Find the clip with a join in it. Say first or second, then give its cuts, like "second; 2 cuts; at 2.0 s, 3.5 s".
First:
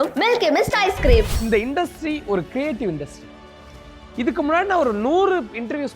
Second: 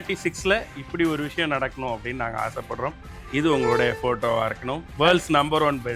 first; 1 cut; at 1.3 s